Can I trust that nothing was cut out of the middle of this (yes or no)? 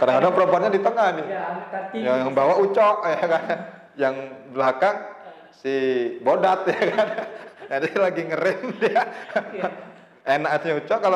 yes